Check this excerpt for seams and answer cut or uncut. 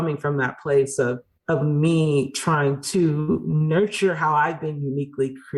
cut